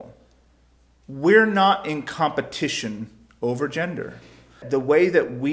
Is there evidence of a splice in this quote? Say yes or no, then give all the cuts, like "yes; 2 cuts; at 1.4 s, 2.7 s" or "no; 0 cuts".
yes; 1 cut; at 4.6 s